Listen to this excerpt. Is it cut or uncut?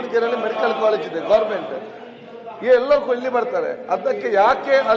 uncut